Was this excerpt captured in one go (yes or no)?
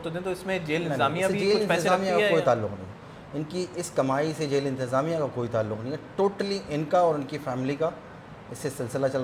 yes